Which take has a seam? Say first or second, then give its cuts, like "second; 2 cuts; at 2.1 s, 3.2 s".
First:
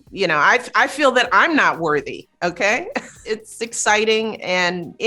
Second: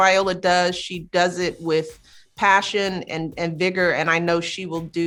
first; 1 cut; at 3.2 s